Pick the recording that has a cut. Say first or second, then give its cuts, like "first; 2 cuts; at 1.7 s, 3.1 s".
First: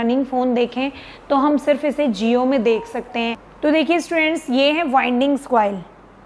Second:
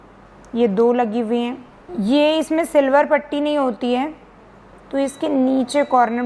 first; 1 cut; at 3.4 s